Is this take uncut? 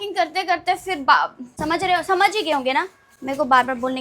no; 1 cut; at 1.5 s

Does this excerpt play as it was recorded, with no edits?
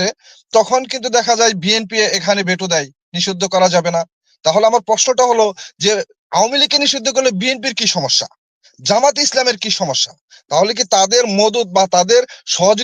yes; 0 cuts

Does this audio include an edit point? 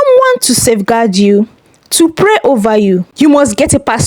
yes; 1 cut; at 3.1 s

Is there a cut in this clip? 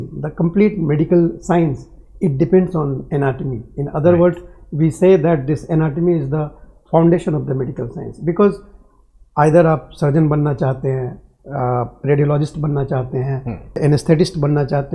yes; 1 cut; at 13.8 s

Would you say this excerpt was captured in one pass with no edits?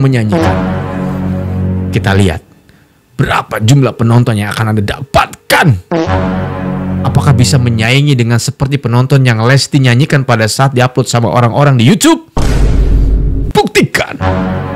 yes; 0 cuts

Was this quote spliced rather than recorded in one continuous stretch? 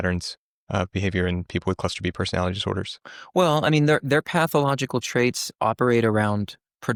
no; 0 cuts

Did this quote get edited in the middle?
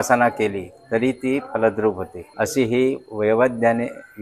no; 0 cuts

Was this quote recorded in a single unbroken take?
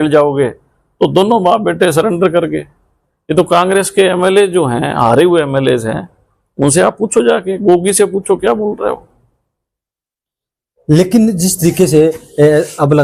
yes; 0 cuts

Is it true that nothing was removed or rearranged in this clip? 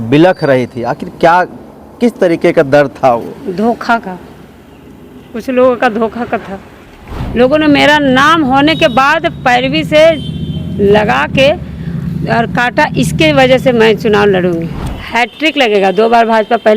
no; 2 cuts; at 7.2 s, 14.7 s

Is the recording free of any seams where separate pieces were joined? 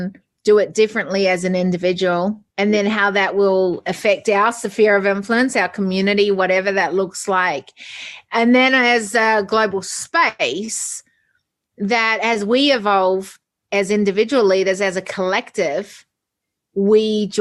no; 1 cut; at 2.4 s

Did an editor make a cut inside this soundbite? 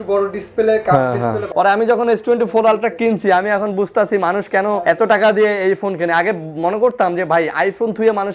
yes; 2 cuts; at 1.4 s, 4.8 s

